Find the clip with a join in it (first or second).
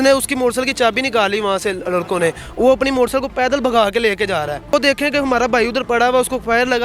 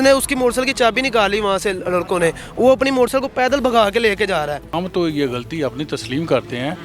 second